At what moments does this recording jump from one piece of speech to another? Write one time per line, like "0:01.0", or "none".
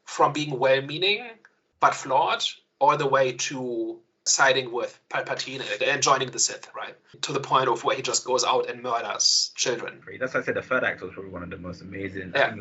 none